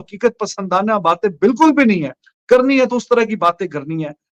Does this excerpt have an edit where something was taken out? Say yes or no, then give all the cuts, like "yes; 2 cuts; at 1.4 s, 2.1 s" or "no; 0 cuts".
no; 0 cuts